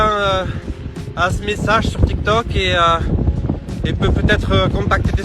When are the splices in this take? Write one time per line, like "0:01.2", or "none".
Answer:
none